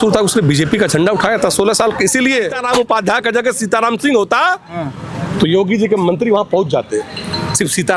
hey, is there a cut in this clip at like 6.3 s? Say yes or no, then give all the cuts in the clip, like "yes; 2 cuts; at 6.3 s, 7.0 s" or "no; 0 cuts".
no; 1 cut; at 2.6 s